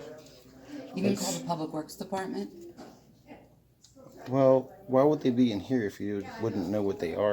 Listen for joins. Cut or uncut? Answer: uncut